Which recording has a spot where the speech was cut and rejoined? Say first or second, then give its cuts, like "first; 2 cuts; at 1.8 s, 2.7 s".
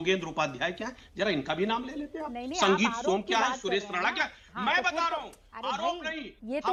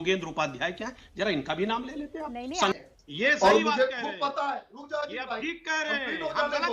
second; 1 cut; at 2.7 s